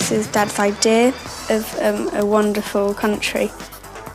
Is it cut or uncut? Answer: cut